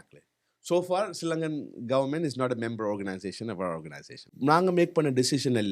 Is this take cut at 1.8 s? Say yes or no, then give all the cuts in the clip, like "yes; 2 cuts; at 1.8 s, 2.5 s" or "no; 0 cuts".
no; 1 cut; at 4.3 s